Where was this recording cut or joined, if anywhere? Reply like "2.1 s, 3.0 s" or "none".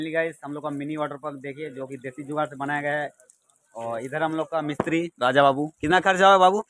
none